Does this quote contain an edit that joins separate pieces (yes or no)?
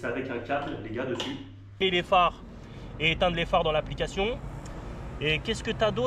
yes